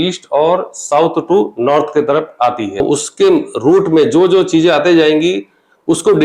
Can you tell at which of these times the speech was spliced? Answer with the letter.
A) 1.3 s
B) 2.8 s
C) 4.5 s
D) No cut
B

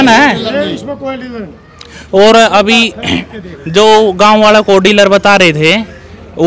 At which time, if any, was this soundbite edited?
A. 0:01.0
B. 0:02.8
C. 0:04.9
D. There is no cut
D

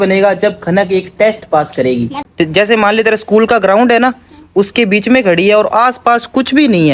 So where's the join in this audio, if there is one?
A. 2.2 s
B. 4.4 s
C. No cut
A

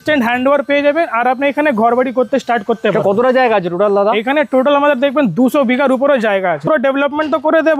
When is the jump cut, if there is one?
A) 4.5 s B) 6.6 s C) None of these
B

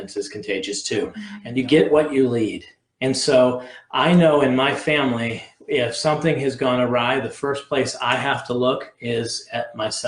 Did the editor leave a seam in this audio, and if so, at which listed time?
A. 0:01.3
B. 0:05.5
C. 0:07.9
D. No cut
A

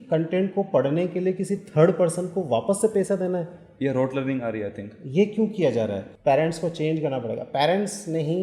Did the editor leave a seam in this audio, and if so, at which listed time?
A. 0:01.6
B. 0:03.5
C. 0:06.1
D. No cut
C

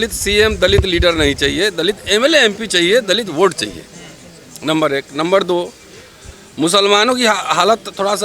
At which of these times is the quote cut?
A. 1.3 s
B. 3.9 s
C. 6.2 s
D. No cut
D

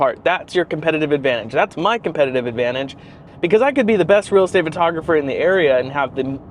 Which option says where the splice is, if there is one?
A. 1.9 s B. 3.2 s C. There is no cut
B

